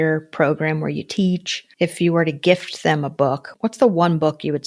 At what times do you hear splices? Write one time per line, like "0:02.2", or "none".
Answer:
0:01.6
0:03.5

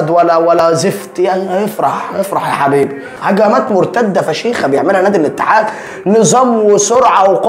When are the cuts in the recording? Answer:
0:03.1

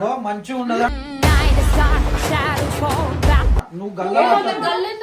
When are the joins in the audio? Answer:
0:03.6

